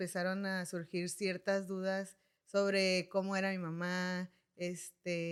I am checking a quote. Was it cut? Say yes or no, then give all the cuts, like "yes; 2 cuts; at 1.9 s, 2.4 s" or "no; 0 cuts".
no; 0 cuts